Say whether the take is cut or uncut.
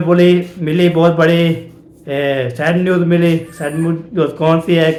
uncut